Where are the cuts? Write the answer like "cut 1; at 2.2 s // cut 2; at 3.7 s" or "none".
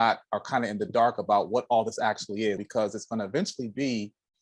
cut 1; at 2.6 s